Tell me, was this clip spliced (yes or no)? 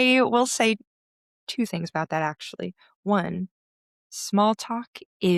no